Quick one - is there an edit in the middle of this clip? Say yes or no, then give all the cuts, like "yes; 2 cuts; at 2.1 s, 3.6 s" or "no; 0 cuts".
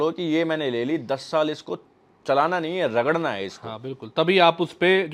no; 0 cuts